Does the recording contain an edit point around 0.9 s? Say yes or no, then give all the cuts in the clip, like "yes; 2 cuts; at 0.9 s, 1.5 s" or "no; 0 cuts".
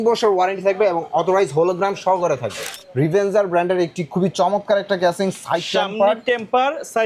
no; 1 cut; at 2.8 s